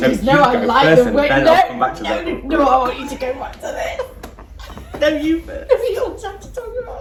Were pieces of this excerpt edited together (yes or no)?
no